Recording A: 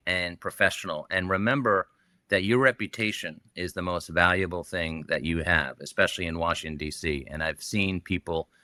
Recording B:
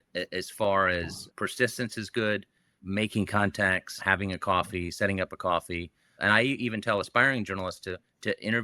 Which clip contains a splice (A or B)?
B